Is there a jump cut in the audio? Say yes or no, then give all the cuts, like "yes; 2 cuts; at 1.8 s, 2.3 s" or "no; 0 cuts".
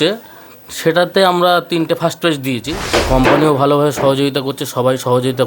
yes; 1 cut; at 2.8 s